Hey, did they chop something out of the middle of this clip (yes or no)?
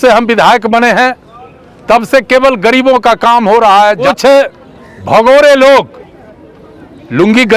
yes